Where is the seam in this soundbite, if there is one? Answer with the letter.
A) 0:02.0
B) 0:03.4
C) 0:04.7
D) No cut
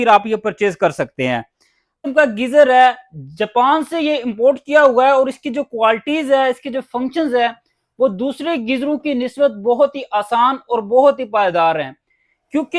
A